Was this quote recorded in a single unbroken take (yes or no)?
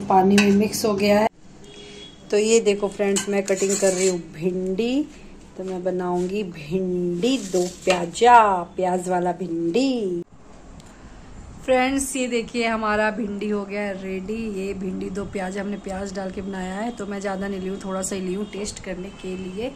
no